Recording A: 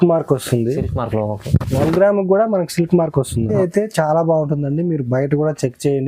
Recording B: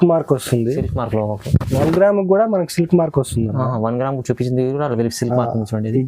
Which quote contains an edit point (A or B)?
A